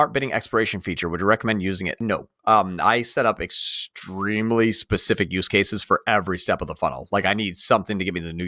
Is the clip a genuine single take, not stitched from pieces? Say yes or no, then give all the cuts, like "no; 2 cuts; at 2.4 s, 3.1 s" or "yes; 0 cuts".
no; 1 cut; at 2.0 s